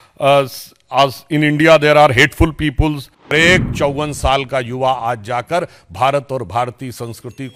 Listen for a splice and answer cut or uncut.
cut